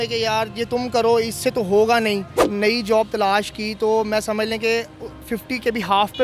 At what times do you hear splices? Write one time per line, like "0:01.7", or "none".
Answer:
0:02.4